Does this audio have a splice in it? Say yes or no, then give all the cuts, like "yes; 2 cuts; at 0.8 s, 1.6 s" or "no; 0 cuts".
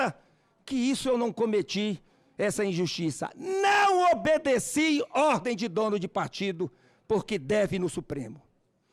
no; 0 cuts